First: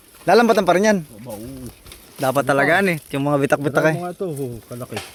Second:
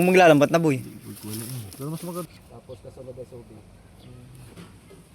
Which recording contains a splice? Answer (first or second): second